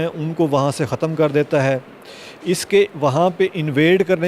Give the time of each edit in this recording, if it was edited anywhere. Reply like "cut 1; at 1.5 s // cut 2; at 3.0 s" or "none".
none